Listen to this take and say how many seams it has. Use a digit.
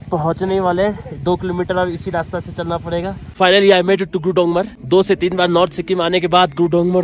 2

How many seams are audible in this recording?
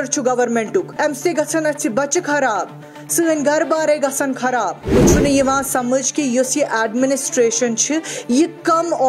2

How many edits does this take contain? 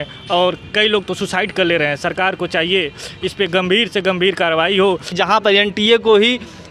1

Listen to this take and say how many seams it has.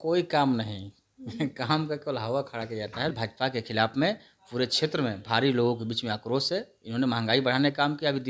1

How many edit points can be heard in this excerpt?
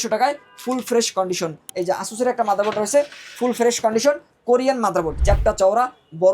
2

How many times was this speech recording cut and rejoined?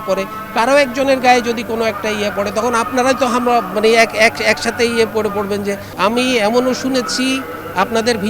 1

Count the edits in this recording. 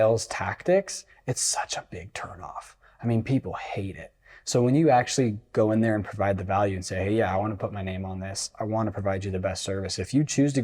0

